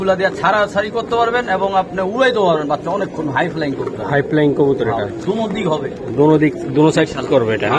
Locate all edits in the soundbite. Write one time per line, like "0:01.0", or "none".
none